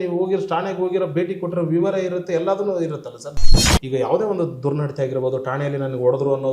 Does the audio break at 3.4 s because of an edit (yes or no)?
yes